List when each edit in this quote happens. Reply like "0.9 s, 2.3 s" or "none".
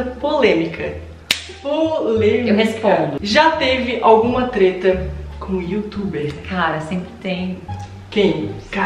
3.2 s